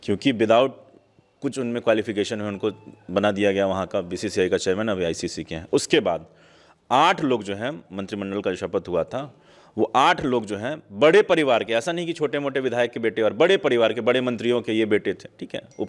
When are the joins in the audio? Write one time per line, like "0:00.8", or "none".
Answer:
none